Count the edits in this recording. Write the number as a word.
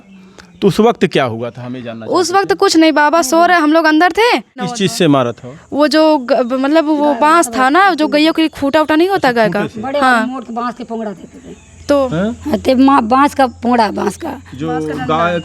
one